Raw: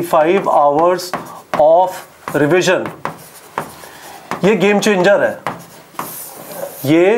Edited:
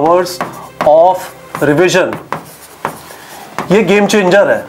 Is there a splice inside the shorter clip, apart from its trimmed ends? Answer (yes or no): no